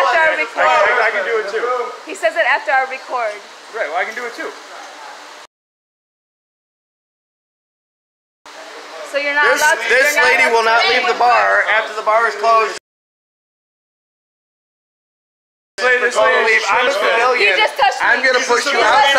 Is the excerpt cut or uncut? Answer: uncut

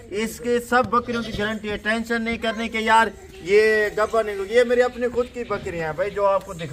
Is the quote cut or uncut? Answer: uncut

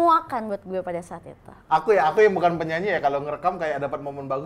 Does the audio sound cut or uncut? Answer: cut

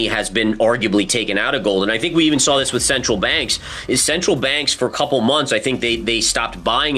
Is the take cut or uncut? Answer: uncut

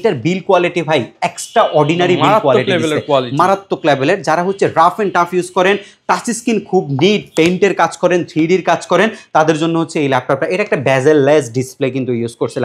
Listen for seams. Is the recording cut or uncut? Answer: uncut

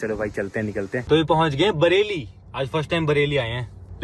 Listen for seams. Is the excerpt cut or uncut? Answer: cut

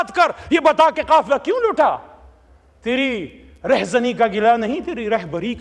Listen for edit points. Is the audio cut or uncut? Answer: uncut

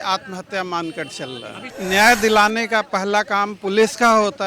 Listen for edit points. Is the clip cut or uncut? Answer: cut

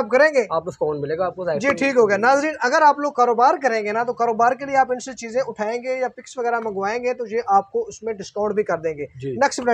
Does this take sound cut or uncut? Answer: uncut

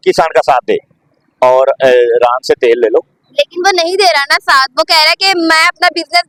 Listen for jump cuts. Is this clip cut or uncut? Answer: uncut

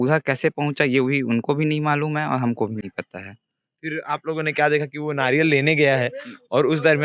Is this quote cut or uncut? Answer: uncut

